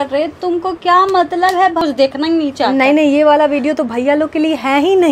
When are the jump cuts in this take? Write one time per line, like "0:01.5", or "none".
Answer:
0:01.8